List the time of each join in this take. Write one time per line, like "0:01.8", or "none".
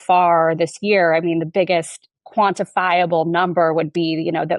none

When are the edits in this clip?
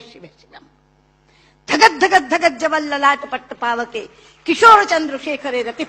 none

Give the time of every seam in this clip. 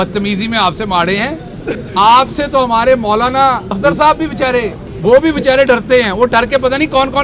0:01.8
0:03.8
0:04.8

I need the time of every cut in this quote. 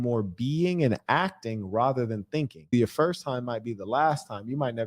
0:02.7

